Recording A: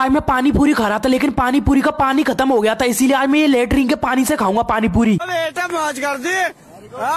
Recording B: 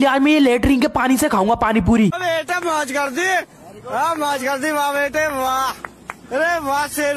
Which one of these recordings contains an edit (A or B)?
B